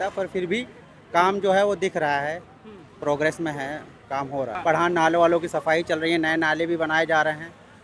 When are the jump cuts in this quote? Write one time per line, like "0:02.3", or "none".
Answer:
0:04.5